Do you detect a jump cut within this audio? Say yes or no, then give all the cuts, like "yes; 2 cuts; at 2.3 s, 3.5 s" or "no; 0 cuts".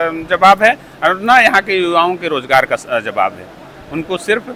no; 0 cuts